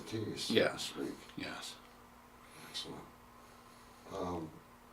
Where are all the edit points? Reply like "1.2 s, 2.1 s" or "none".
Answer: 1.1 s